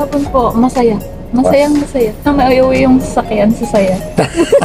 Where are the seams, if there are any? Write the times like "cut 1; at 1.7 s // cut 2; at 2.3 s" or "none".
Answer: cut 1; at 2.2 s